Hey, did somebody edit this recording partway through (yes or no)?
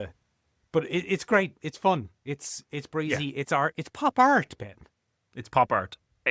no